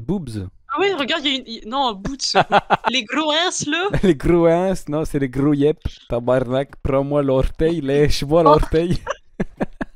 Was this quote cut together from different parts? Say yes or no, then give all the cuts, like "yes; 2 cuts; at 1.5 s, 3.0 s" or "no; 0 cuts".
yes; 2 cuts; at 2.9 s, 5.9 s